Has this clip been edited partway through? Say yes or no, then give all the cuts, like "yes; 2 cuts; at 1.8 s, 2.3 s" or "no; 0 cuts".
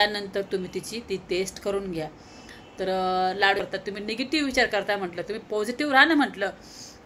yes; 1 cut; at 3.7 s